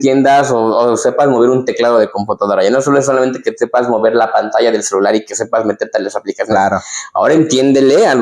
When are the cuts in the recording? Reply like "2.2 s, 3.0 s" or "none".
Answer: none